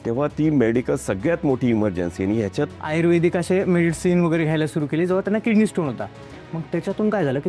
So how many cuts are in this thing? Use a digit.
1